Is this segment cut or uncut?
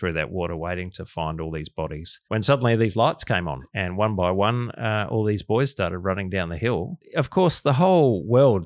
cut